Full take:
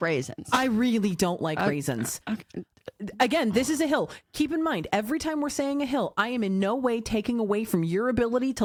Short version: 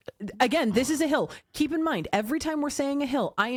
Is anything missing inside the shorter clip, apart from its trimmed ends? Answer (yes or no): no